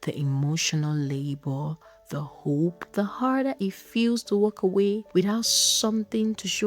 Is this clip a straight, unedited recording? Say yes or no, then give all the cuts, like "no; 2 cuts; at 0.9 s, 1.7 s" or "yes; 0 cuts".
no; 2 cuts; at 2.8 s, 5.0 s